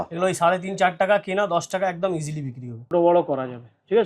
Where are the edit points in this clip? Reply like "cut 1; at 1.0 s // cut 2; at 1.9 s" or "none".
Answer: cut 1; at 2.9 s